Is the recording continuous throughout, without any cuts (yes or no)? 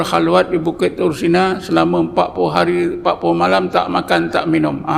yes